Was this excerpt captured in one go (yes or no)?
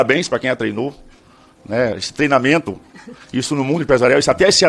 yes